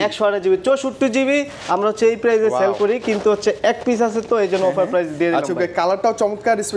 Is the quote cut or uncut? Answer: uncut